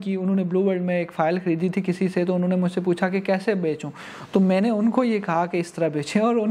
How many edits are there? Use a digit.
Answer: 0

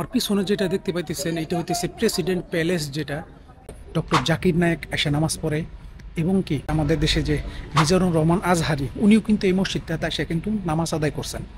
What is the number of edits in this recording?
2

